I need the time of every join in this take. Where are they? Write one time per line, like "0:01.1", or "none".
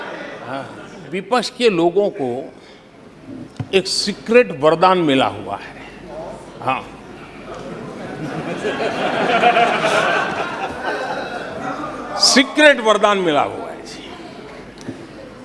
0:01.1